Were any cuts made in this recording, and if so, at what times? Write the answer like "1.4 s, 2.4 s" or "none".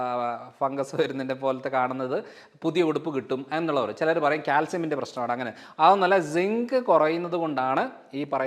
none